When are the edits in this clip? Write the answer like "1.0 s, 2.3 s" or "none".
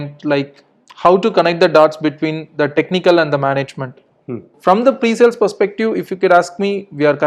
4.5 s

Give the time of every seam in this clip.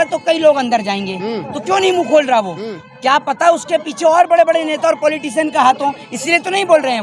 none

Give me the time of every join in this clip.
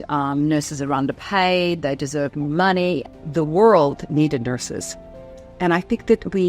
3.1 s

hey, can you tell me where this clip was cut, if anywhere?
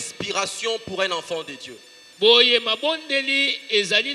none

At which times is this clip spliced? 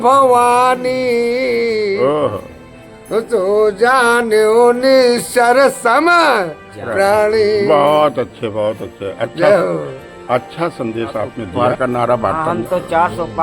11.8 s

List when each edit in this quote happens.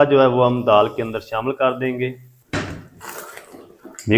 2.3 s

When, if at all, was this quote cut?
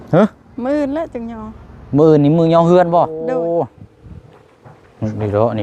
3.2 s

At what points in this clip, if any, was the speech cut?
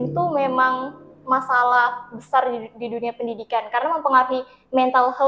none

